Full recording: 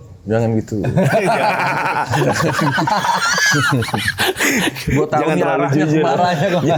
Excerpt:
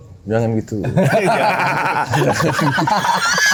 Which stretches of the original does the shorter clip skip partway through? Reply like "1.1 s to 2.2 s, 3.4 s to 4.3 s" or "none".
none